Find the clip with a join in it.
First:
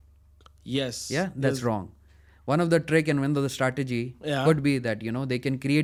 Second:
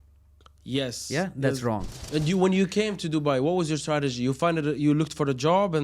second; 1 cut; at 1.9 s

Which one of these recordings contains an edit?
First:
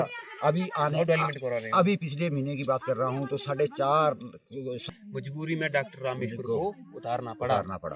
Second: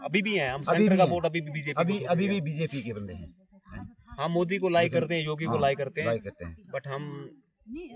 first; 1 cut; at 4.8 s

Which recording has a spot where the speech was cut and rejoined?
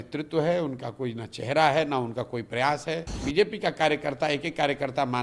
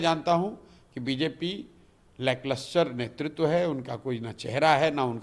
first; 1 cut; at 3.2 s

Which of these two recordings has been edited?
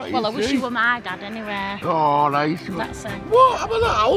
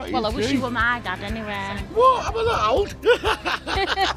second; 1 cut; at 1.7 s

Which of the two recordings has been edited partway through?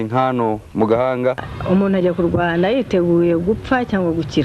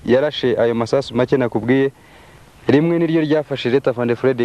first; 1 cut; at 1.5 s

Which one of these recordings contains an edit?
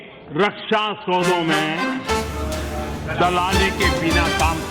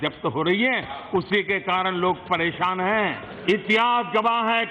second; 1 cut; at 3.3 s

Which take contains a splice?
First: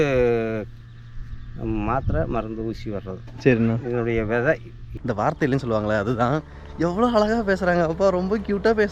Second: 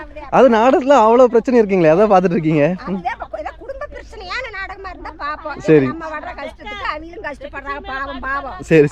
first; 1 cut; at 4.8 s

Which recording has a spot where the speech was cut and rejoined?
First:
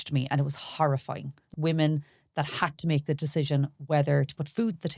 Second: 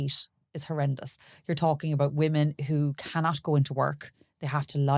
first; 1 cut; at 1.5 s

